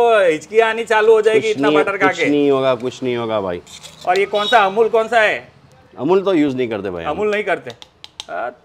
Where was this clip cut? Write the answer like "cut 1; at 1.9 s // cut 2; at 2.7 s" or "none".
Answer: none